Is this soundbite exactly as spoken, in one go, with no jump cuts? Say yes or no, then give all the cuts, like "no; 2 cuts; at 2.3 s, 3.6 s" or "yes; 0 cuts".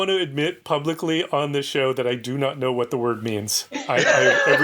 yes; 0 cuts